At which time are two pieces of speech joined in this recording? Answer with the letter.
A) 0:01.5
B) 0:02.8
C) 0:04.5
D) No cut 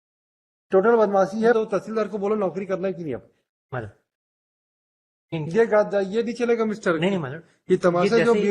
A